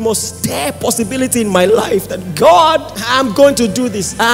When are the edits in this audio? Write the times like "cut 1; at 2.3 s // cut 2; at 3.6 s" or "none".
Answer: cut 1; at 3.0 s